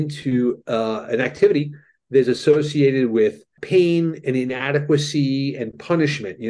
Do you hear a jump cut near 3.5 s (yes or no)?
yes